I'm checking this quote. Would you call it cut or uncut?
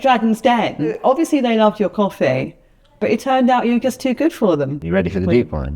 cut